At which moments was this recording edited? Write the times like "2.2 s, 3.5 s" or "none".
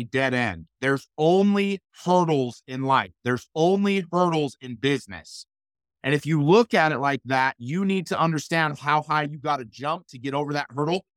none